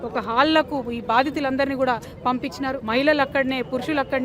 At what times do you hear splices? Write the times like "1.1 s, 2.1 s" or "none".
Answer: 2.8 s